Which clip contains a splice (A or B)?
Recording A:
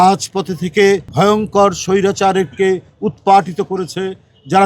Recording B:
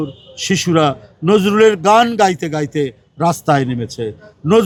A